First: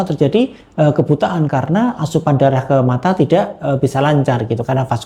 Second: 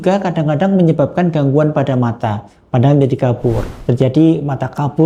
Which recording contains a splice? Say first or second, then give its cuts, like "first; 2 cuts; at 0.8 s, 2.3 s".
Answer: second; 1 cut; at 3.7 s